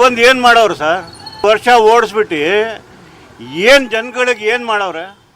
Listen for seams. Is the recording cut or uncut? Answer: cut